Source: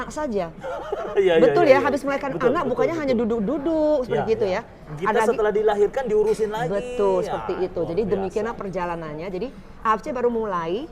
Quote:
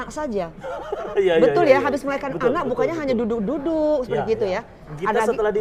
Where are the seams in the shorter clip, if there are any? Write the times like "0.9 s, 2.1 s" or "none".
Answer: none